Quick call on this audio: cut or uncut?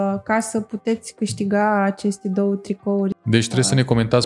cut